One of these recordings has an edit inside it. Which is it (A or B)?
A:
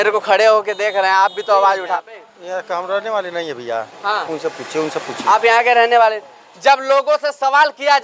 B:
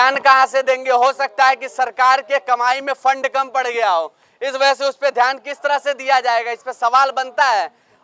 A